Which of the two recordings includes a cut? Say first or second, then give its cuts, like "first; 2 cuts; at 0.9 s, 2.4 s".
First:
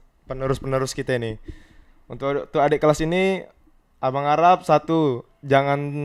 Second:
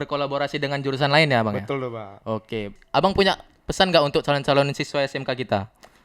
second; 1 cut; at 2.8 s